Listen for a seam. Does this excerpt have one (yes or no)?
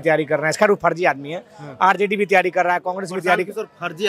no